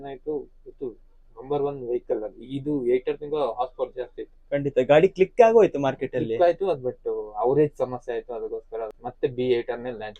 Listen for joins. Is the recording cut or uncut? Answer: cut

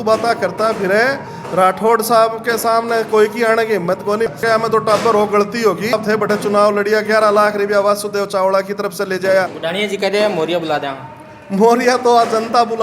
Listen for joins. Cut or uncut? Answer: cut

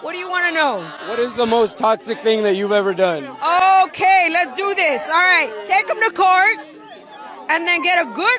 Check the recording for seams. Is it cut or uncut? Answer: uncut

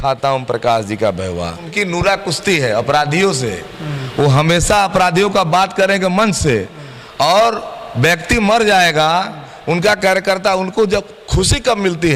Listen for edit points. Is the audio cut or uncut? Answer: cut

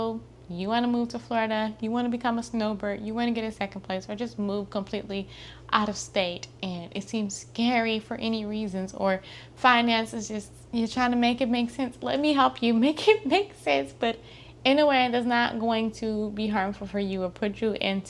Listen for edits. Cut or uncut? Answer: uncut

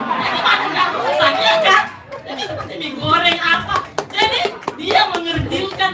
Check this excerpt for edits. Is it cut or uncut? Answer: uncut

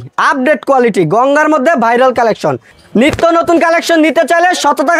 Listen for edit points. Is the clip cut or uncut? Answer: cut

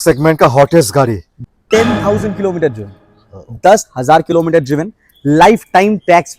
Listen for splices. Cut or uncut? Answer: cut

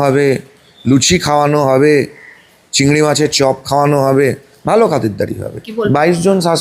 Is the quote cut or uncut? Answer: cut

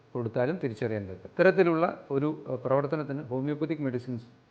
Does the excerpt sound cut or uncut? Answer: cut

